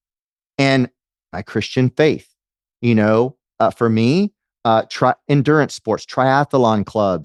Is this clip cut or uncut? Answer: uncut